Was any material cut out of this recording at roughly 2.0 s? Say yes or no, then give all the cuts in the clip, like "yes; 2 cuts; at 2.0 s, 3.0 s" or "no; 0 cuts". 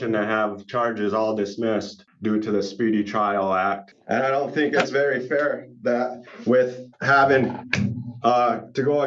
yes; 2 cuts; at 2.0 s, 3.9 s